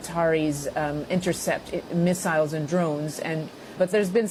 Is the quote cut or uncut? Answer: uncut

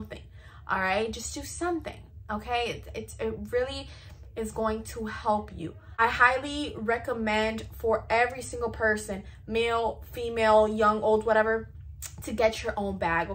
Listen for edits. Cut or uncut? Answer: cut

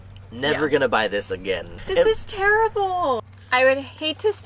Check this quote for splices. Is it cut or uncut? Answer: cut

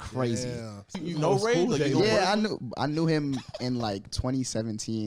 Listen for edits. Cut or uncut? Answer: cut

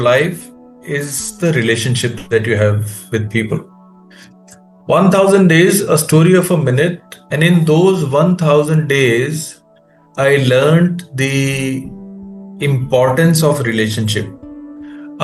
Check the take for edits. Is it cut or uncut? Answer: uncut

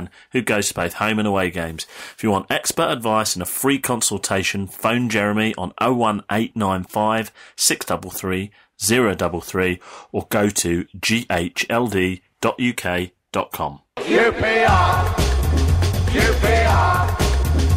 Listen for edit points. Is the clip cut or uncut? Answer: cut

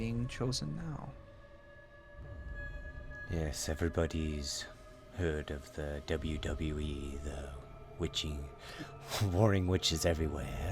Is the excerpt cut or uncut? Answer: cut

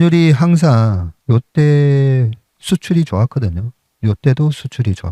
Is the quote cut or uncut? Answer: cut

